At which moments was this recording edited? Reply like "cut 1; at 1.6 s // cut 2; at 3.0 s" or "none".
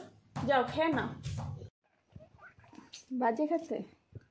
cut 1; at 1.7 s